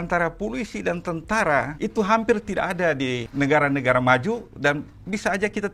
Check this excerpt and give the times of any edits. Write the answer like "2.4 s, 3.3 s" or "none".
1.7 s, 3.2 s